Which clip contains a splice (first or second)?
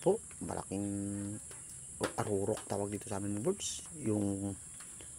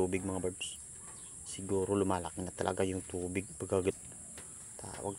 second